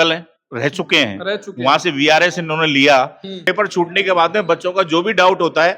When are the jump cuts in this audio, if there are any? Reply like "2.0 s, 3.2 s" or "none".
3.5 s